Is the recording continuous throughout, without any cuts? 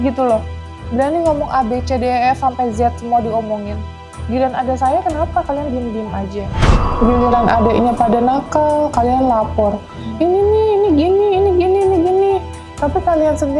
no; 1 cut; at 6.8 s

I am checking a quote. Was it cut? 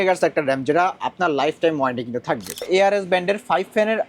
yes; 1 cut; at 2.7 s

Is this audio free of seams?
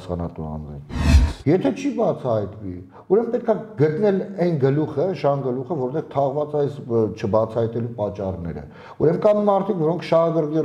no; 1 cut; at 1.0 s

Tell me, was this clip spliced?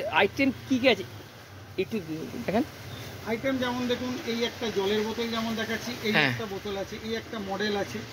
no; 0 cuts

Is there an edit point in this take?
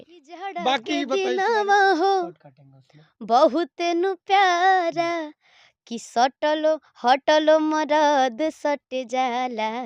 yes; 1 cut; at 1.1 s

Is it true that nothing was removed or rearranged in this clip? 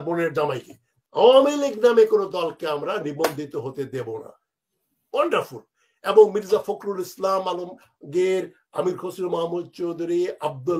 no; 1 cut; at 0.9 s

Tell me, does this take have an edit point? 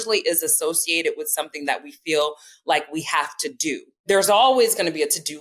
yes; 1 cut; at 3.9 s

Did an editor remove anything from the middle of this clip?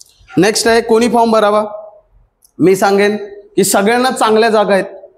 no; 0 cuts

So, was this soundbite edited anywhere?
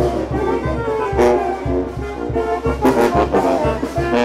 no; 0 cuts

